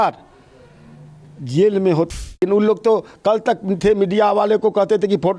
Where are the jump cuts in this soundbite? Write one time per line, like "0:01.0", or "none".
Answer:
0:02.1